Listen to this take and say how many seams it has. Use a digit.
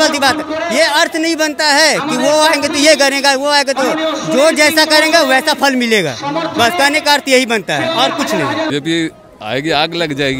1